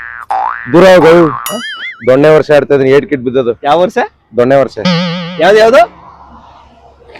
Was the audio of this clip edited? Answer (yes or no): no